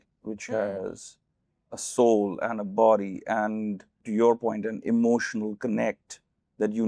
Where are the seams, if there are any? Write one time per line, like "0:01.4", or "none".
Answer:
0:04.0